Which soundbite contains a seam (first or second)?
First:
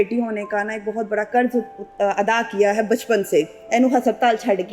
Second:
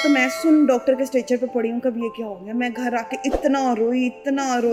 first